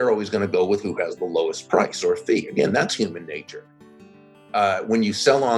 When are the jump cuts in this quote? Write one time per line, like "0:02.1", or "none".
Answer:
0:04.0